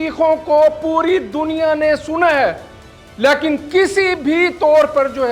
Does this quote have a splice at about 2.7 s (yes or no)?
no